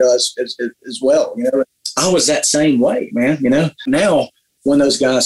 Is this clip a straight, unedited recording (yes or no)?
no